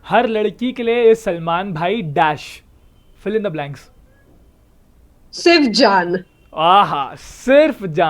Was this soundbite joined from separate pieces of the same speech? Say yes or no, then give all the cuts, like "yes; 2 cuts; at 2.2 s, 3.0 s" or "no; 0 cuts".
no; 0 cuts